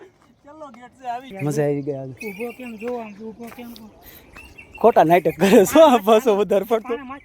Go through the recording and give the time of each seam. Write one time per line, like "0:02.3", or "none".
0:01.3